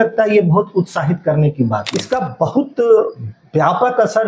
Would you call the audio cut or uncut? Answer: cut